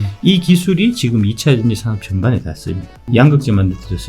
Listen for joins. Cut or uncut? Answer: cut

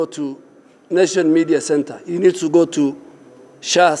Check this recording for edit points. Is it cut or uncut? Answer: uncut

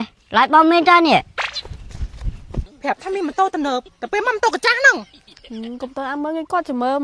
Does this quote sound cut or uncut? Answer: cut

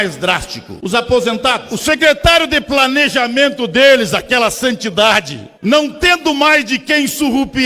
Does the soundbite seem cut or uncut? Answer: cut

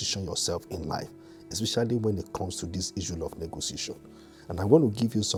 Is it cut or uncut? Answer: uncut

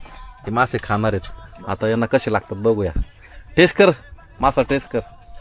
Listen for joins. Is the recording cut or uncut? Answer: uncut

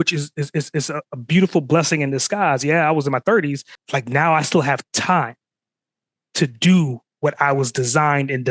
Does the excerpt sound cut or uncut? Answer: cut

